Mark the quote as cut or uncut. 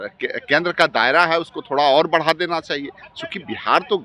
uncut